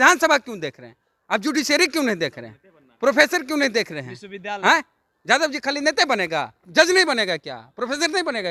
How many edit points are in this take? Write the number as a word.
zero